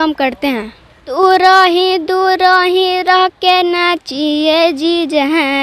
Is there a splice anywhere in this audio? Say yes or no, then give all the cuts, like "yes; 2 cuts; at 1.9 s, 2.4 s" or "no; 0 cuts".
yes; 1 cut; at 1.1 s